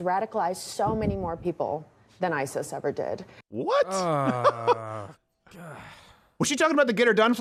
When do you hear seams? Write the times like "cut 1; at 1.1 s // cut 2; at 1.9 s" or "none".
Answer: none